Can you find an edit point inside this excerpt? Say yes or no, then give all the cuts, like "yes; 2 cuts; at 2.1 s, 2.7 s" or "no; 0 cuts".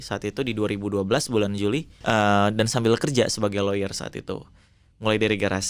yes; 1 cut; at 1.9 s